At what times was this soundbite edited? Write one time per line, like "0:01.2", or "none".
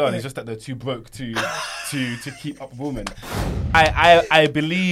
0:03.4